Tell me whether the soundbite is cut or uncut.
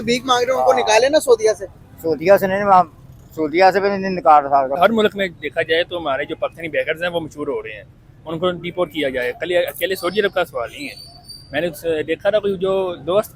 cut